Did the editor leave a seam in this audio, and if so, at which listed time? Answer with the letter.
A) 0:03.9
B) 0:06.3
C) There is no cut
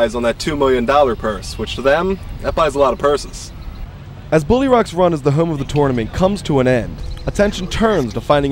C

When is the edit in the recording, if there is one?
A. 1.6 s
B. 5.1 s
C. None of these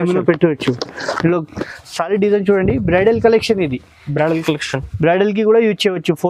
A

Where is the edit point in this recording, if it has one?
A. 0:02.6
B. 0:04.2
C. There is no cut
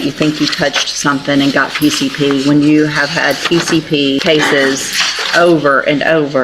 B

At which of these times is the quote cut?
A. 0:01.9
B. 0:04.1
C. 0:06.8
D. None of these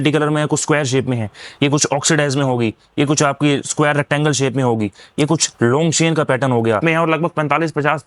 C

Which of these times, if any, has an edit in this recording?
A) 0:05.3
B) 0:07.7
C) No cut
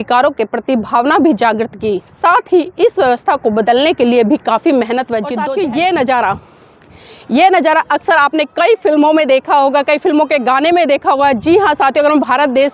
A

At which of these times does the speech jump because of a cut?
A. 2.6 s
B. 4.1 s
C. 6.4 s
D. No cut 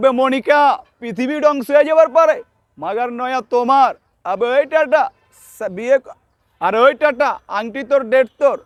D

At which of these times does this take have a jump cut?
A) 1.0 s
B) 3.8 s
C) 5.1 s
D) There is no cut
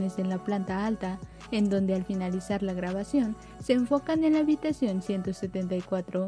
D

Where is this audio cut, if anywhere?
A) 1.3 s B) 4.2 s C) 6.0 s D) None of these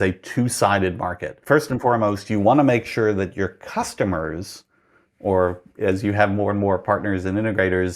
A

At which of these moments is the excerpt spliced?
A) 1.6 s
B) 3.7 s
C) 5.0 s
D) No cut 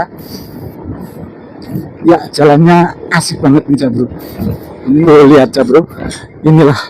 C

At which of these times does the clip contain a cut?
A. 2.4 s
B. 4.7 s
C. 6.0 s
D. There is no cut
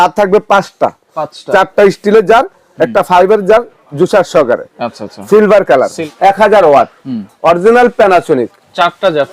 C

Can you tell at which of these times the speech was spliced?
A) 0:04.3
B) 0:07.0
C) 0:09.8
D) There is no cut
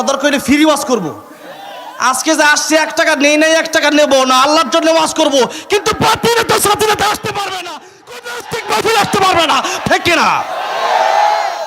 C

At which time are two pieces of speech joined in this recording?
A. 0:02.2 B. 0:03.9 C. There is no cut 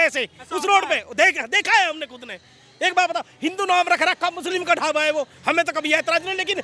C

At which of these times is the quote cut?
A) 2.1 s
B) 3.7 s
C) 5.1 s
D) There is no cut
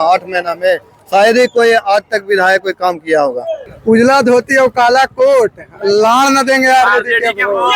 B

